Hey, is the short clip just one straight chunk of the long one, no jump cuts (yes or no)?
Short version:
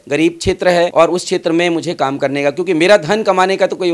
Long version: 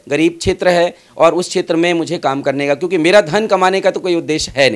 no